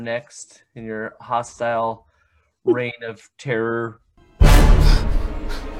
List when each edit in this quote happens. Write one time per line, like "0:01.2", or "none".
none

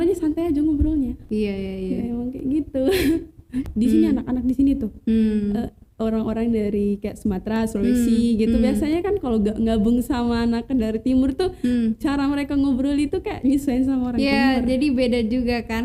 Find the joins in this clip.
none

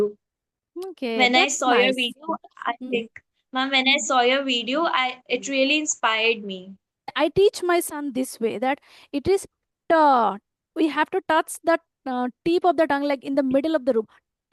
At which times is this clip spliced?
0:07.1

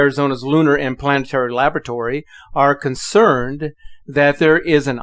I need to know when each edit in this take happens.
none

